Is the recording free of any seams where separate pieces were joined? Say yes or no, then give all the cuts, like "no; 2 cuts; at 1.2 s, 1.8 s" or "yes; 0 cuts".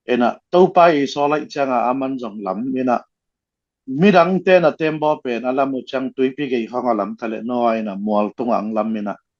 yes; 0 cuts